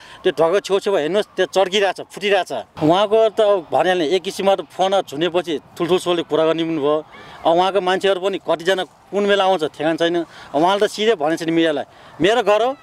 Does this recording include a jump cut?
yes; 1 cut; at 2.6 s

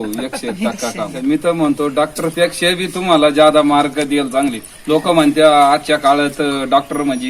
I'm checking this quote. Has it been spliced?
yes; 1 cut; at 1.2 s

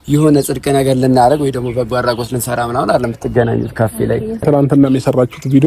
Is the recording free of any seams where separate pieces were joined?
no; 1 cut; at 4.4 s

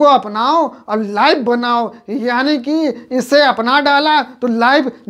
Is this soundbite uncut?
yes; 0 cuts

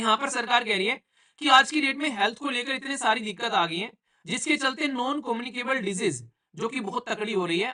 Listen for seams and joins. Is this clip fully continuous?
yes; 0 cuts

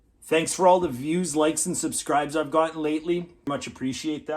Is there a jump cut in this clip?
yes; 1 cut; at 3.4 s

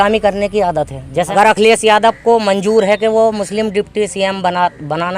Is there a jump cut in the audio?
yes; 1 cut; at 1.3 s

